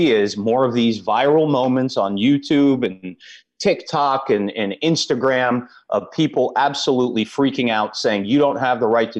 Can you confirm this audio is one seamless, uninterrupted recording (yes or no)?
yes